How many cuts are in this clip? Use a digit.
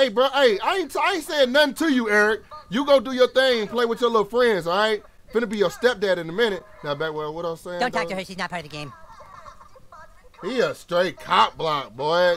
0